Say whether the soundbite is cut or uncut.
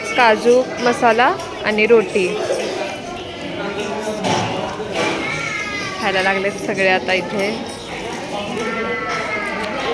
uncut